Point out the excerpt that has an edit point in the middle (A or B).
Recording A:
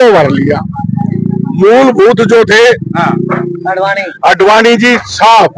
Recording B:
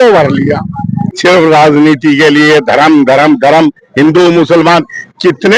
B